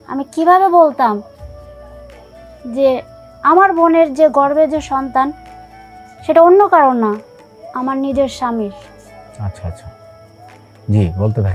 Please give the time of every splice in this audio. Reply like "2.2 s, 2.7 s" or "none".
1.4 s, 2.6 s